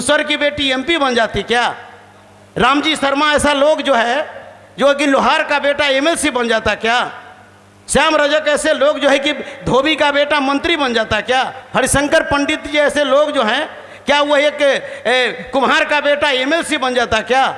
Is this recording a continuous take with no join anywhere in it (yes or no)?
yes